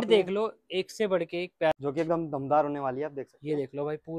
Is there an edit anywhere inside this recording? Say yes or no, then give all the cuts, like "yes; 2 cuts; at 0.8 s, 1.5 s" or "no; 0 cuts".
yes; 1 cut; at 1.7 s